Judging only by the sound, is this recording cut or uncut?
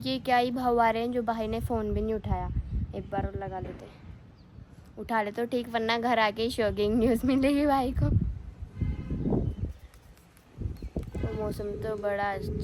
uncut